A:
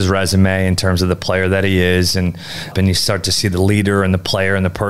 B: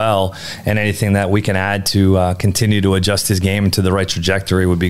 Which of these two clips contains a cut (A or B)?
A